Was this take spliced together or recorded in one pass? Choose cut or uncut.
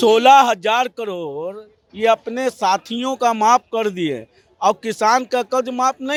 uncut